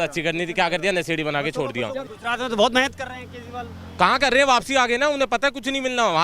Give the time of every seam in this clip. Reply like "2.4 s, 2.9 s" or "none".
2.1 s